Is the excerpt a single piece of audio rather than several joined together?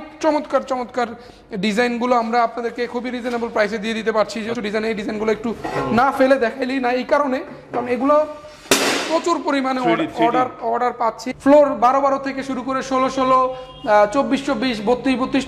no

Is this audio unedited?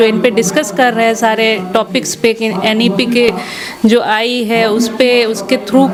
yes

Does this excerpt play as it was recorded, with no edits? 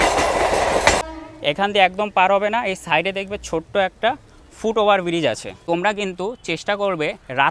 no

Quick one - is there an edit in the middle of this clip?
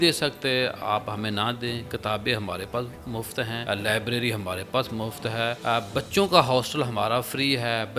yes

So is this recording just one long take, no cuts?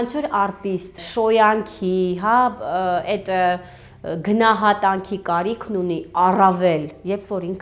no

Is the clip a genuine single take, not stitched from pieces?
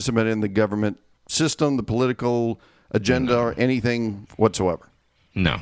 yes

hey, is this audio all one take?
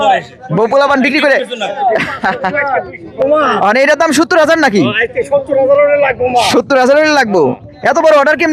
no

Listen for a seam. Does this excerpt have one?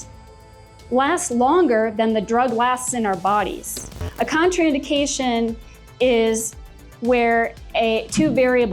yes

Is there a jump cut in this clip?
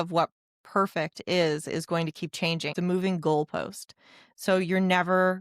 yes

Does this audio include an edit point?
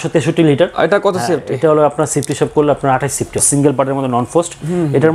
yes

